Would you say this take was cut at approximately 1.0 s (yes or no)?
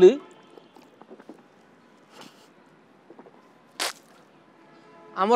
yes